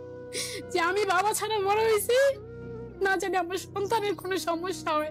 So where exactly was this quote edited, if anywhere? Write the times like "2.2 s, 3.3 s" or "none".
none

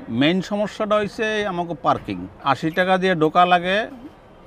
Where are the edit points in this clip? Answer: 2.3 s

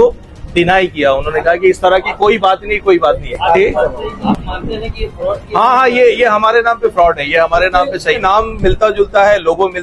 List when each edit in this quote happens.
3.3 s, 8.2 s

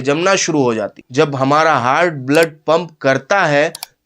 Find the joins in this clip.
1.0 s

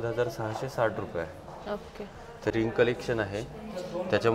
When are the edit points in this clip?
2.5 s

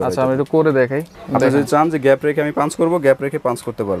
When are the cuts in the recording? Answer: 1.1 s

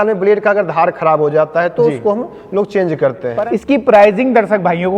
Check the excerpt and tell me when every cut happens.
3.3 s

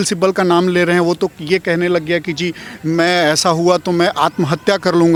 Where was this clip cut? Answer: none

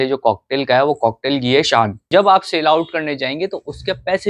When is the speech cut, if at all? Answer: 2.0 s

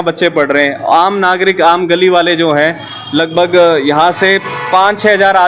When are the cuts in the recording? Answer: none

